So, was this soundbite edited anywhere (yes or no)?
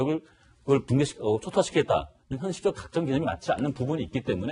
no